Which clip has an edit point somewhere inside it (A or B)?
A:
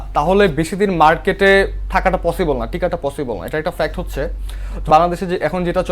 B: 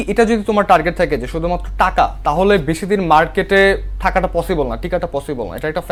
A